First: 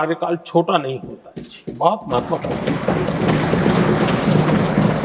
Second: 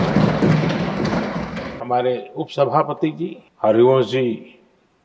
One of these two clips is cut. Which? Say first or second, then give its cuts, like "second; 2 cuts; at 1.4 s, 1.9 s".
second; 2 cuts; at 1.7 s, 3.4 s